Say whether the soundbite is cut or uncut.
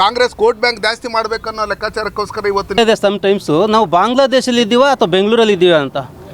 cut